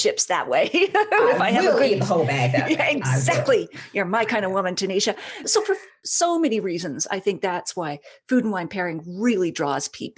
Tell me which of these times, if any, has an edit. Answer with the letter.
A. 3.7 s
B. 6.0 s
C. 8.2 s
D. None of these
B